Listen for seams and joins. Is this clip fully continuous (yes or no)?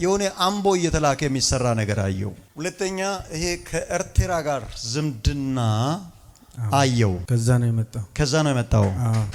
yes